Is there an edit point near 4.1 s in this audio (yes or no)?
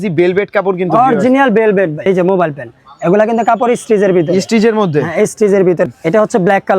no